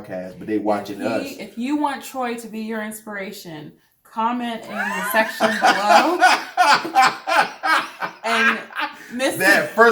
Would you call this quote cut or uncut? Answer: uncut